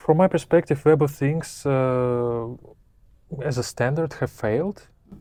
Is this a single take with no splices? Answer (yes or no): yes